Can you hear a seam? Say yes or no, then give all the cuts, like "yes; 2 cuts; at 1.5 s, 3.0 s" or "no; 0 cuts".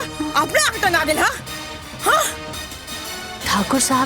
yes; 1 cut; at 2.6 s